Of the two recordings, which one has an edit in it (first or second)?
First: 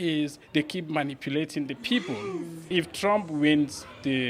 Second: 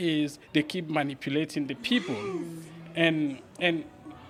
first